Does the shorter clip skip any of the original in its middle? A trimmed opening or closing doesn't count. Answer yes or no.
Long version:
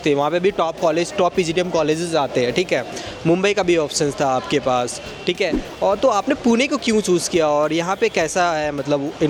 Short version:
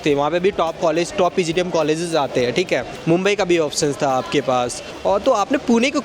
yes